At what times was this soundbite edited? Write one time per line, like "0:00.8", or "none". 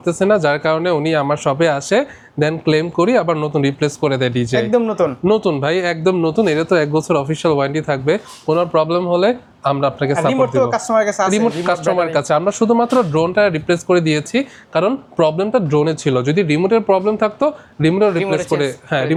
none